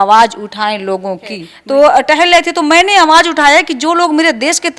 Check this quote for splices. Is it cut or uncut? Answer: cut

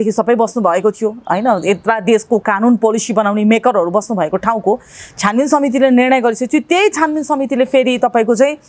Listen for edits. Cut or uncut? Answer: uncut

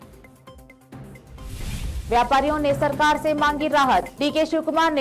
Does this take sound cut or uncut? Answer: cut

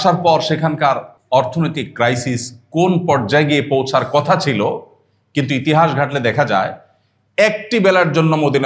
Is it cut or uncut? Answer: cut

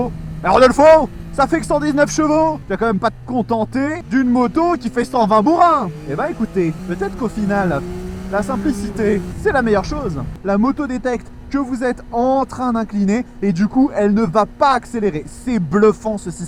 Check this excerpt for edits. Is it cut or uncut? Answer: cut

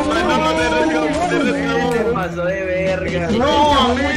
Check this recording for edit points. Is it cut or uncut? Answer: uncut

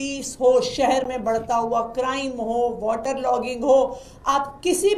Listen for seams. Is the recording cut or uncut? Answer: uncut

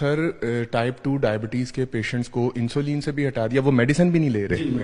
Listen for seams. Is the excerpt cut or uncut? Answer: uncut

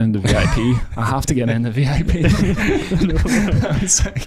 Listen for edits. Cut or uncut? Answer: uncut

